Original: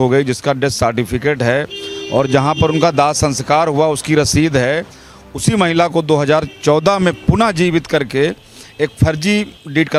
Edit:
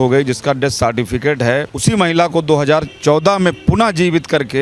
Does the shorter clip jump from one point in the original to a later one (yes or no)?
yes